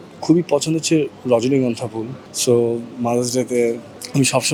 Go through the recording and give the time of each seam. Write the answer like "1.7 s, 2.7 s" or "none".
none